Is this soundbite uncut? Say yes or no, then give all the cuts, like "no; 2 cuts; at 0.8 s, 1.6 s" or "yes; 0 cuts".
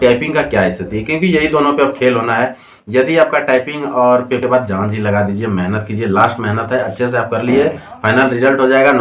no; 1 cut; at 4.4 s